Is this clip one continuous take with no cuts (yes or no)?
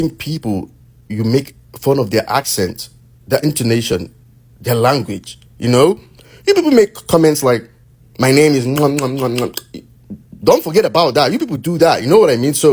yes